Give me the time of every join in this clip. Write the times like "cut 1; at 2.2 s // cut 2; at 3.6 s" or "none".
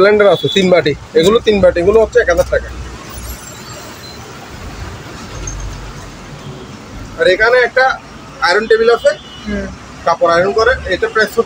none